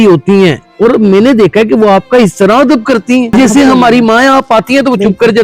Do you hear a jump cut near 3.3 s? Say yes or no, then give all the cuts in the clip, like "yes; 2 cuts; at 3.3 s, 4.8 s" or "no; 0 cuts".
yes; 1 cut; at 3.3 s